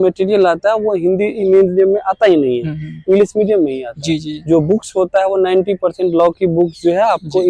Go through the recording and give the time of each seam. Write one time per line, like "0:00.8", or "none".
none